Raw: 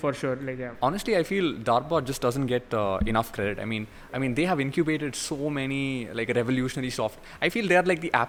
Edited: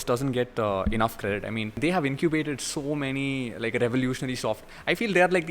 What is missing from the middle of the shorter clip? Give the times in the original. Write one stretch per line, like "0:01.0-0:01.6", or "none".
0:03.9-0:04.3